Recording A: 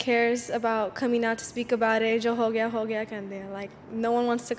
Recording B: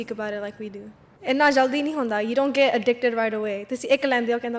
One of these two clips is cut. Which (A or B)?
B